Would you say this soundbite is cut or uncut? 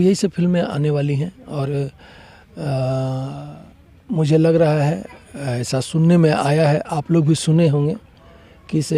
uncut